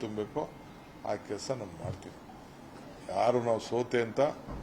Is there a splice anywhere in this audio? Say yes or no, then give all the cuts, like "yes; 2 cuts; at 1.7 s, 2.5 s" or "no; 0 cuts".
yes; 1 cut; at 2.5 s